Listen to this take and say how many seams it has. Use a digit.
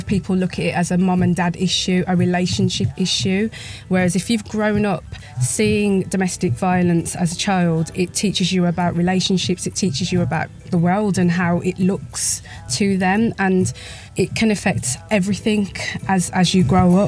4